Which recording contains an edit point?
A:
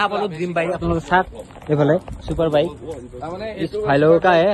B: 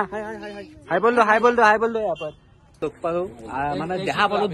B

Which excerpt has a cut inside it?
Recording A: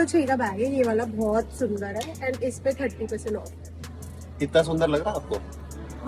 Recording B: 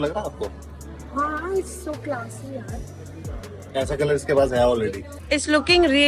B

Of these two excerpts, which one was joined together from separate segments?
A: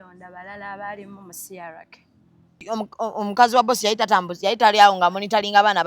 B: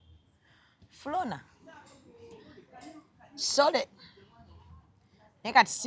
A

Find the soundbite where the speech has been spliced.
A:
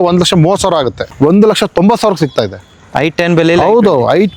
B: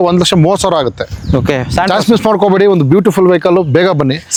A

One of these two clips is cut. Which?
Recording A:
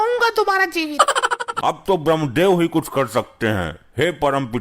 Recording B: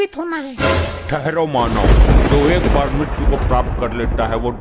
A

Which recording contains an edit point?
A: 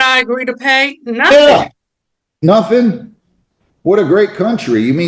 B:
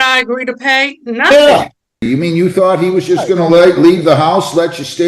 B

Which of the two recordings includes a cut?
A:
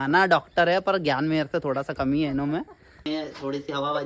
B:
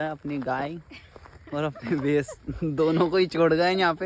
A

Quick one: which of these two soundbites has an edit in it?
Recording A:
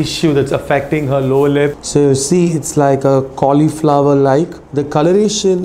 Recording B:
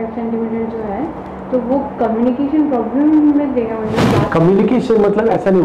A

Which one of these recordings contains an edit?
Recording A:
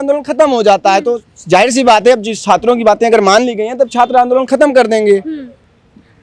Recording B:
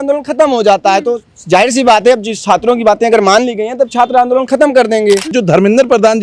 B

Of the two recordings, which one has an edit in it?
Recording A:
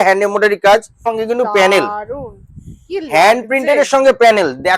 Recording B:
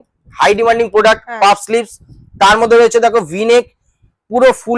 A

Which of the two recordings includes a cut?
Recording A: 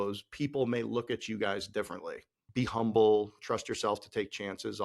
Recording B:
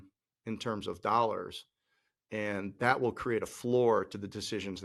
A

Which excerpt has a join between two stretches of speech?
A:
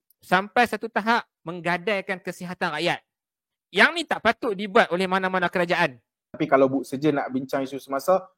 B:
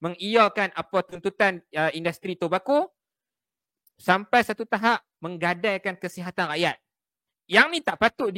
A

